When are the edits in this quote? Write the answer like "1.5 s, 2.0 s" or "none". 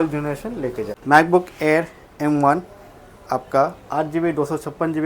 0.9 s